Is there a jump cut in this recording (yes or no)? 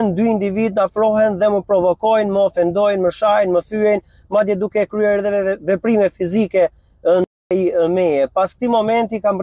yes